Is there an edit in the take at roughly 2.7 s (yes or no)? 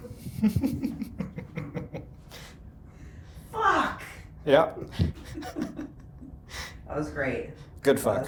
no